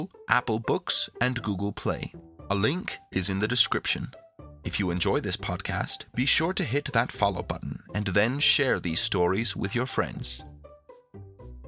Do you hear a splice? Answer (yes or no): yes